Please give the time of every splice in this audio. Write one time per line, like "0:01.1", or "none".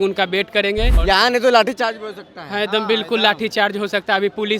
0:00.9

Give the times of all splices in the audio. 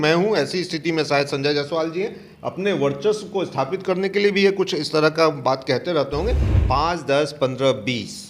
0:06.5

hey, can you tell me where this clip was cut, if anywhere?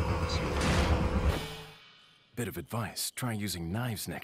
0:01.3

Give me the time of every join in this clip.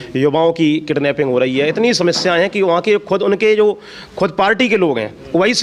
none

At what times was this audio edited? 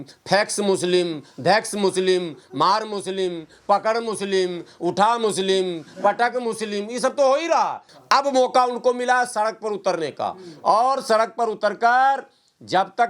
0:07.9

